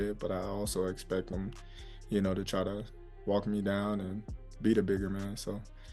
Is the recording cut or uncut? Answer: uncut